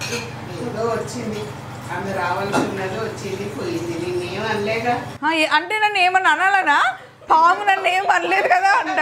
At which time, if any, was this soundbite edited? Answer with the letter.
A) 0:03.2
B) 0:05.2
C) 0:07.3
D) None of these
D